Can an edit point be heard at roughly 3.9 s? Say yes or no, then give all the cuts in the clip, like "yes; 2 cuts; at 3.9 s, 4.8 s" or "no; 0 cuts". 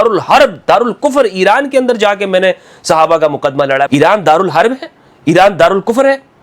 yes; 1 cut; at 3.9 s